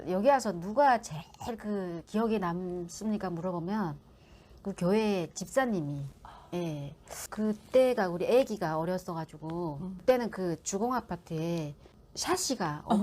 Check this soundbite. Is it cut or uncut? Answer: uncut